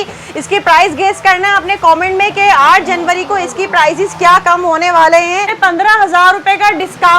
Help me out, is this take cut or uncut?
cut